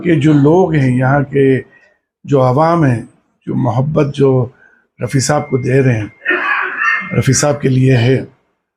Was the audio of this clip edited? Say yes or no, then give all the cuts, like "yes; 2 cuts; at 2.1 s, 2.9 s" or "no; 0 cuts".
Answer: no; 0 cuts